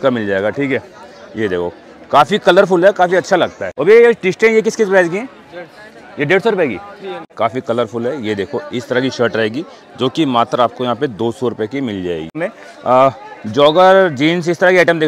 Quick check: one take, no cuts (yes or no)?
no